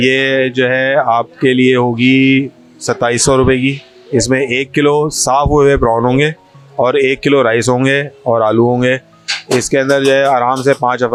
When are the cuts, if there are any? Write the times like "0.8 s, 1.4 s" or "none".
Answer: none